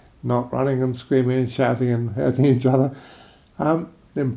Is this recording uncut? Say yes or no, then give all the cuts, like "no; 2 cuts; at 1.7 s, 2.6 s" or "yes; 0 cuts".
yes; 0 cuts